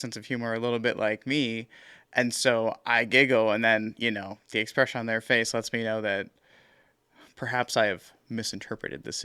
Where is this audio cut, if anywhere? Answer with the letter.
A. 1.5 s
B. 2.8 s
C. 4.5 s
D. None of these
D